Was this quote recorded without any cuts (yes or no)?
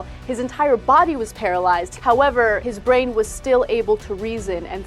no